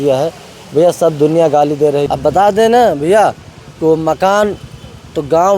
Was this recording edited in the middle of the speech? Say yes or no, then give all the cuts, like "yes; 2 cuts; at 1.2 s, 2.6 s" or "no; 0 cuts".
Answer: yes; 1 cut; at 2.1 s